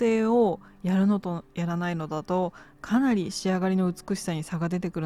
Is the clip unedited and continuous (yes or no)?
yes